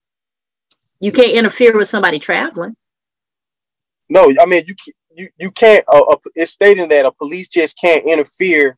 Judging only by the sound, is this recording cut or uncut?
uncut